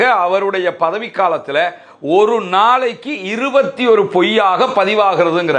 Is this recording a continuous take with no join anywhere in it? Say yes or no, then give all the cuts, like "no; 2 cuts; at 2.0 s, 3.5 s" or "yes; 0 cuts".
yes; 0 cuts